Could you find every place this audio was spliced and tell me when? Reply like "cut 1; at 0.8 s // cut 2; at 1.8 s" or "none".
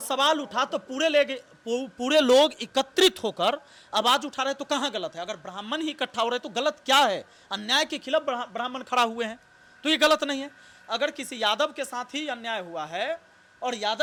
none

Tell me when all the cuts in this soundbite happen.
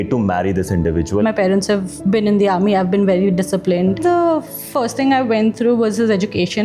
cut 1; at 1.2 s // cut 2; at 4.0 s

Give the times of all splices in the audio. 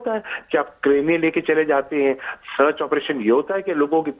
none

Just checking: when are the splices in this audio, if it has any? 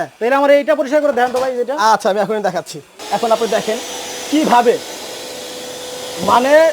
cut 1; at 2.9 s

